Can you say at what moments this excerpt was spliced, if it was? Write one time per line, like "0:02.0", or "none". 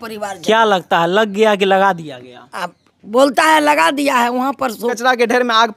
0:04.9